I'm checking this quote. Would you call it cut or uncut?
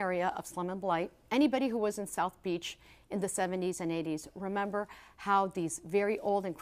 cut